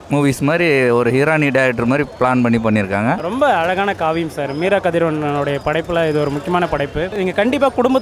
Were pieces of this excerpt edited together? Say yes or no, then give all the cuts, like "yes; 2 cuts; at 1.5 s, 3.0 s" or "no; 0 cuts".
yes; 2 cuts; at 3.2 s, 7.1 s